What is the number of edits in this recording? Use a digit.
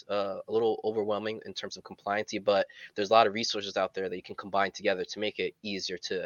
0